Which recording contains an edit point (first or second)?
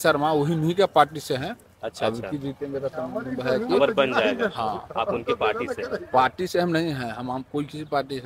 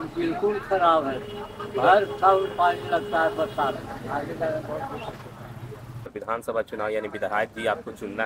second